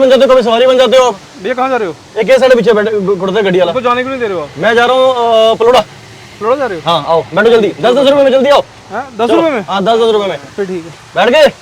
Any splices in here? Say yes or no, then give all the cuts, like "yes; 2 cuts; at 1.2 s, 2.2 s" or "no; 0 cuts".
no; 0 cuts